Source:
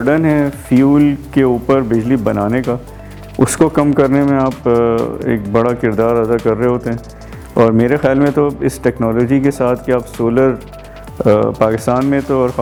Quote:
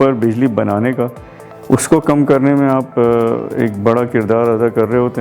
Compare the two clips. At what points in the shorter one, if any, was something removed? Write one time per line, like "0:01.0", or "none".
none